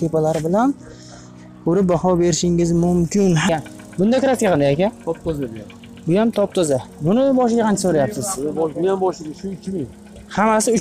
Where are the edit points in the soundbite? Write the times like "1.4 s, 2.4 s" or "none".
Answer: 3.5 s